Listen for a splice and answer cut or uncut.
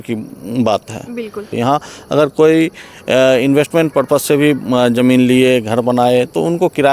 cut